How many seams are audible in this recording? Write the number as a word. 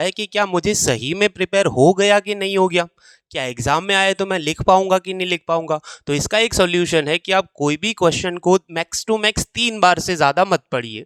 zero